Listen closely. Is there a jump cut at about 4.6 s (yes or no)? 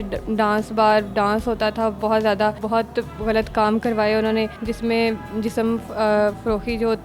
yes